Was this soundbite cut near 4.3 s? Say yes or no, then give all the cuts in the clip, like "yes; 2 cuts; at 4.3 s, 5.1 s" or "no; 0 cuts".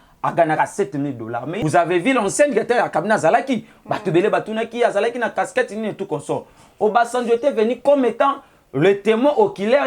no; 1 cut; at 1.5 s